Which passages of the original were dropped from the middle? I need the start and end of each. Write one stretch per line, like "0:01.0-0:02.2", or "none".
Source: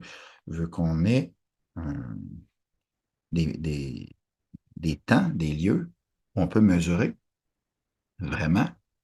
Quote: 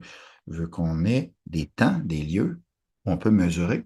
0:01.4-0:04.7